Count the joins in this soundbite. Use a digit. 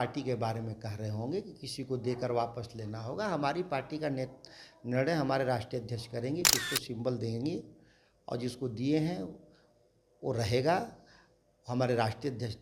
0